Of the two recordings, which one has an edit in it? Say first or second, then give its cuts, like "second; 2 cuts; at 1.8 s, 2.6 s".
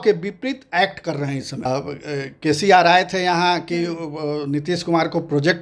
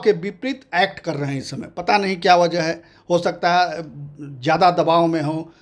first; 1 cut; at 1.7 s